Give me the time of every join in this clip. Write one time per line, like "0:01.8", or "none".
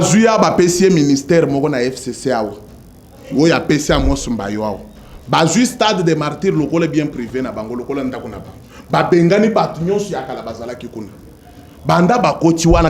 none

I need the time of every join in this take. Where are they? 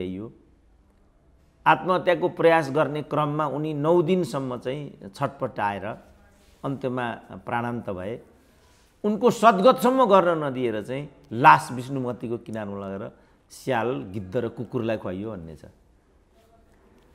none

